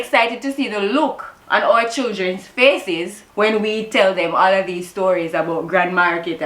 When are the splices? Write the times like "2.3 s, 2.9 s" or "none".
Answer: 1.3 s, 3.2 s